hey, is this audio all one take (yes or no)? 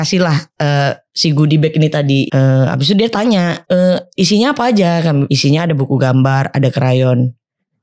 no